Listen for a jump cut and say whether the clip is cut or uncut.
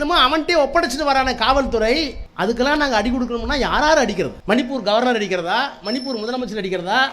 cut